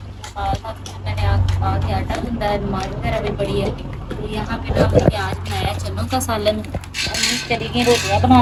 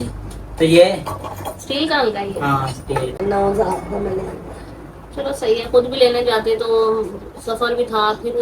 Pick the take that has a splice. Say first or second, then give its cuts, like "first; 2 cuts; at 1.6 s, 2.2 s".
second; 1 cut; at 3.2 s